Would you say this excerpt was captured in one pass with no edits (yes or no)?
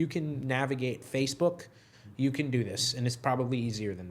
yes